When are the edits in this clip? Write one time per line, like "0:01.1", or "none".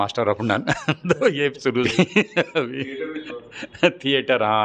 0:01.8